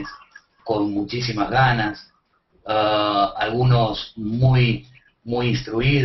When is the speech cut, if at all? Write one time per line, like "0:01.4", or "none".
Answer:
0:05.1